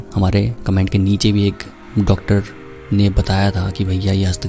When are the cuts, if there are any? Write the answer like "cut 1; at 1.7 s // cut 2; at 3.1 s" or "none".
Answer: none